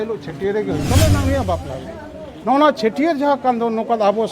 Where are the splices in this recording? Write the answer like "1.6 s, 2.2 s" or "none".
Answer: 1.2 s